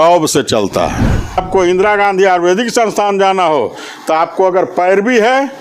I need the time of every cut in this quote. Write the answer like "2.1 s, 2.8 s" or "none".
1.4 s